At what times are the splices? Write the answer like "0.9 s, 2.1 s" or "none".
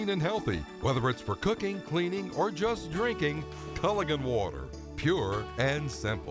none

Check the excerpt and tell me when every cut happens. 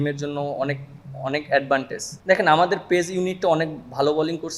2.0 s

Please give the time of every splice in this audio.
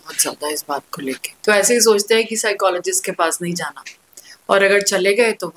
1.3 s

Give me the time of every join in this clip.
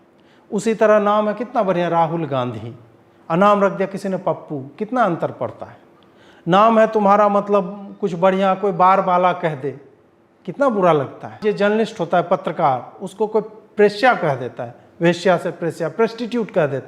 11.4 s

